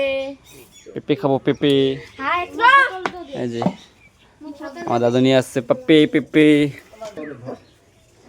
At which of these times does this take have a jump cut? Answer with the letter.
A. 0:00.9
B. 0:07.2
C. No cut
B